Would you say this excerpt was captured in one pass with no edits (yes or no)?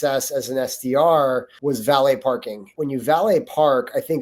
no